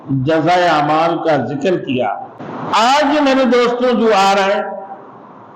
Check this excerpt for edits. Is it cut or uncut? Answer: cut